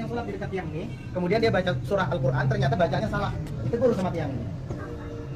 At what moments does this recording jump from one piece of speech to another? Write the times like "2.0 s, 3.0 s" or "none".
none